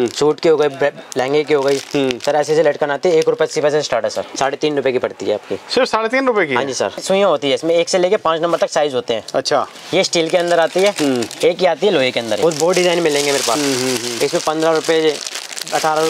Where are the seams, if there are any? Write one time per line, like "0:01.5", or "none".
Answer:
0:04.3
0:07.0
0:12.4